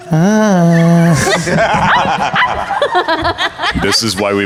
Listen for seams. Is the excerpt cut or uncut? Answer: uncut